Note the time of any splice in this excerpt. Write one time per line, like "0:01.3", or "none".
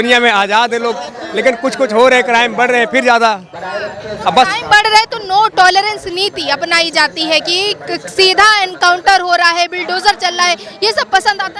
none